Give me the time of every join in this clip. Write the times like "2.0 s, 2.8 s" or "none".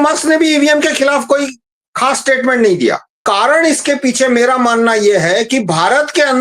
3.1 s